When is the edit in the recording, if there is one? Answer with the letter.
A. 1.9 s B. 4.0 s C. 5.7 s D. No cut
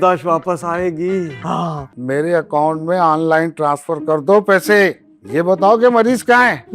A